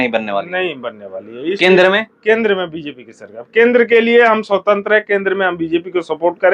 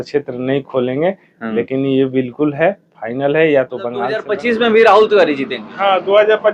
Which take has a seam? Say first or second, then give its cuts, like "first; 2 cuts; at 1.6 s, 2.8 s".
second; 1 cut; at 4.2 s